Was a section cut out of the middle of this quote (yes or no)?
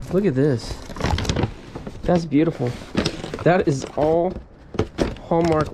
no